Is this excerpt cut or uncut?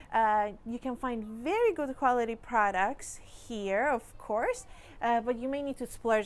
uncut